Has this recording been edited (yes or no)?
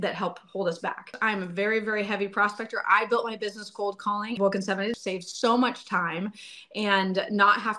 yes